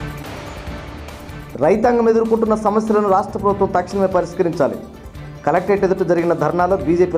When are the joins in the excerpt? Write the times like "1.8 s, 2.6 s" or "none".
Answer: 1.0 s